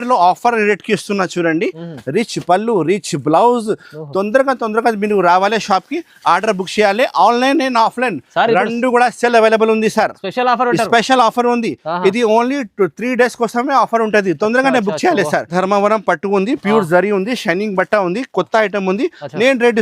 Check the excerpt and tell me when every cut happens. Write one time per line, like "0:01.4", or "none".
0:15.5